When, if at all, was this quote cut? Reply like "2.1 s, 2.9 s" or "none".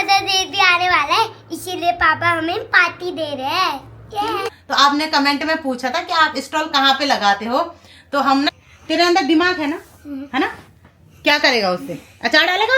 4.5 s, 8.5 s